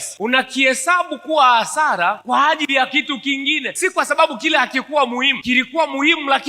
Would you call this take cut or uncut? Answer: cut